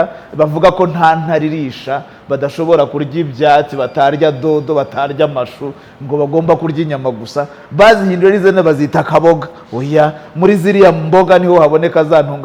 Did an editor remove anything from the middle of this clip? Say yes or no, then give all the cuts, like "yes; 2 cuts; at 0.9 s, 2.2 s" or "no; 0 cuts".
no; 0 cuts